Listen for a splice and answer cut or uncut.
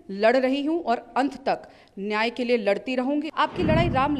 cut